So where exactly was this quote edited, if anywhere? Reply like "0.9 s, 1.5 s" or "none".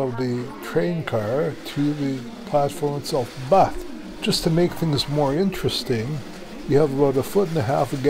none